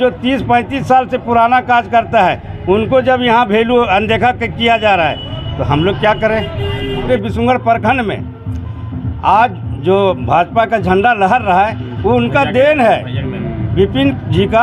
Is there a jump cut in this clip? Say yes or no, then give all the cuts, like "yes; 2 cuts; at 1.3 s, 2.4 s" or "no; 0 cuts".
yes; 1 cut; at 7.0 s